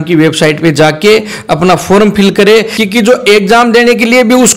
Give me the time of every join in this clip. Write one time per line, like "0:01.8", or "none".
0:02.8